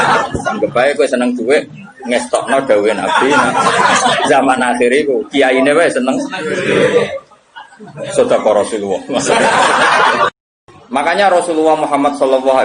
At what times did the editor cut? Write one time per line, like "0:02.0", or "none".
0:10.4

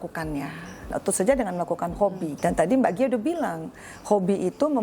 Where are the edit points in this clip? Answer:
0:00.9
0:02.3

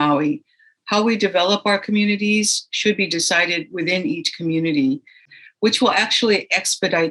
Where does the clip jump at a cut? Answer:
0:05.3

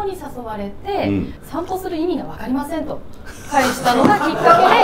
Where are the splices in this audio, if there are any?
0:01.4

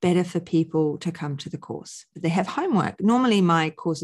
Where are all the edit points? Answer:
0:02.1

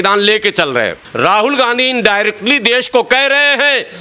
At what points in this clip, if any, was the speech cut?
0:01.0

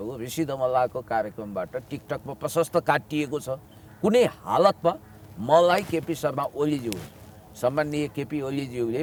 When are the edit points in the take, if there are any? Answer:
none

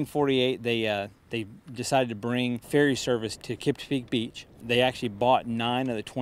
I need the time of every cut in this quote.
0:05.1

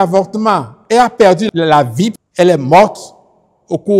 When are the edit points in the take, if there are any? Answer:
0:02.2

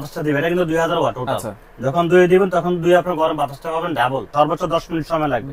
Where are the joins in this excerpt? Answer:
0:04.3

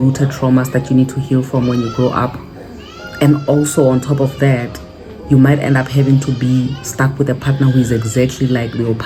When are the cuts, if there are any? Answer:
none

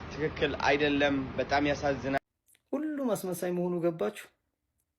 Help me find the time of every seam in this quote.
0:02.2

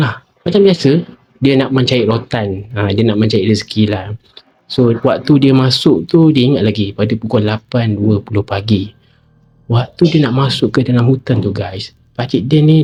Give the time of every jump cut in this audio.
none

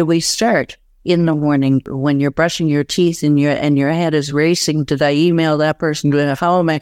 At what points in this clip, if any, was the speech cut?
0:01.9

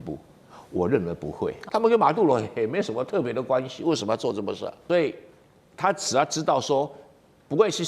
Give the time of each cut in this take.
0:01.6
0:04.8

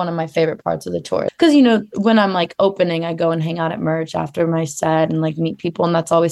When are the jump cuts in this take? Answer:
0:01.3

